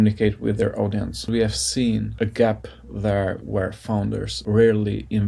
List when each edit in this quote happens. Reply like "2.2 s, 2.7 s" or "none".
1.3 s